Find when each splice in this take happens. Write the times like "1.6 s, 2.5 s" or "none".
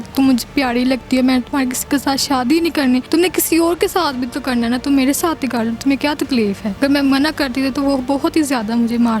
3.1 s, 6.7 s